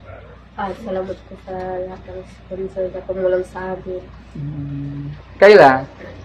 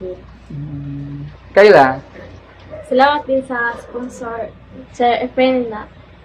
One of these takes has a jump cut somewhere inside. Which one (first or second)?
second